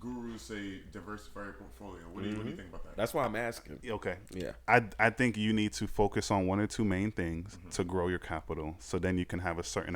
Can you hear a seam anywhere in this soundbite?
no; 0 cuts

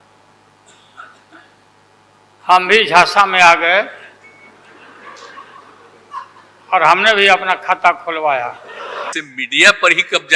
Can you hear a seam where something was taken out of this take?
yes; 1 cut; at 9.1 s

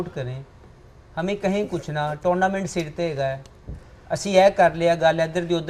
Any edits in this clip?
no; 0 cuts

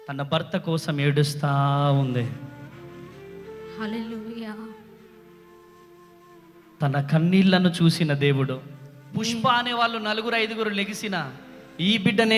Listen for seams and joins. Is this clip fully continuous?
yes; 0 cuts

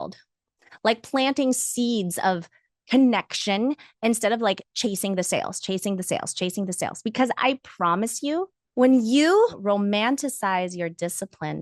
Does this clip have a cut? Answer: yes; 2 cuts; at 8.6 s, 9.6 s

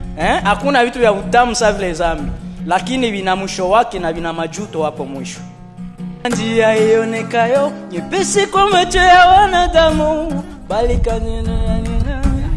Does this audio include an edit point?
yes; 1 cut; at 6.2 s

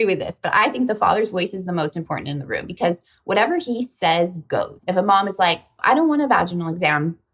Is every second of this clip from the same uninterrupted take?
no; 2 cuts; at 4.8 s, 5.7 s

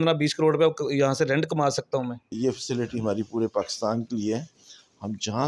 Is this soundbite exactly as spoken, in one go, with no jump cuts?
no; 1 cut; at 2.2 s

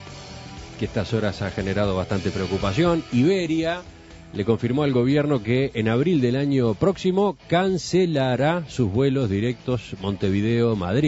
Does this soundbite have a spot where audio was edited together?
yes; 1 cut; at 9.5 s

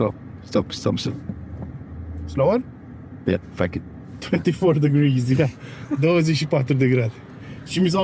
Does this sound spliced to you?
no; 0 cuts

